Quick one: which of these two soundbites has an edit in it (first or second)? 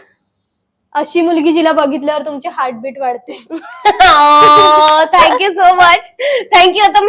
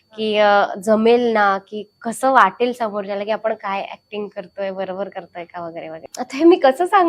second